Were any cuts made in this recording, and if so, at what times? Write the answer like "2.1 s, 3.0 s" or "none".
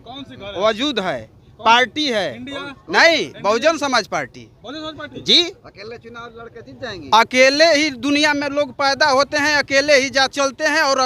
none